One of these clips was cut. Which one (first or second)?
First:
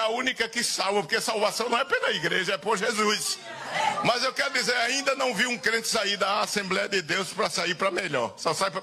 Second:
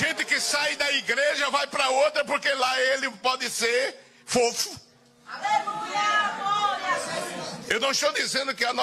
first